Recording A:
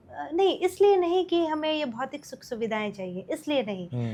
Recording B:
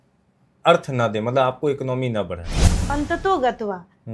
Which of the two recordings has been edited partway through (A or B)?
B